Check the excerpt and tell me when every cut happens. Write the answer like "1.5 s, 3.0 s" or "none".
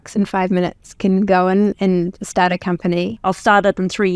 3.1 s